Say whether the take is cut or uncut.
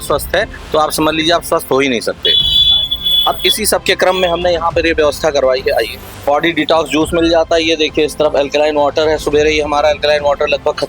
uncut